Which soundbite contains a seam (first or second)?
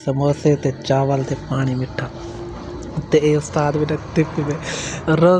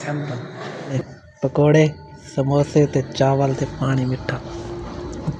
second